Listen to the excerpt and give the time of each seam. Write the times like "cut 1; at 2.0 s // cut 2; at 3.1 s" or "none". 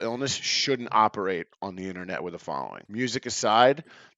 cut 1; at 2.8 s